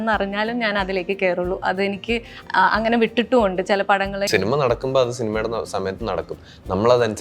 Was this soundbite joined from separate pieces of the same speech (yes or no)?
yes